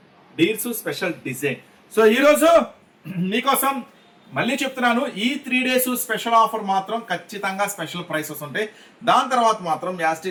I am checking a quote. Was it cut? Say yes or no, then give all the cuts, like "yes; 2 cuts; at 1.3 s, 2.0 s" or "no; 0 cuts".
no; 0 cuts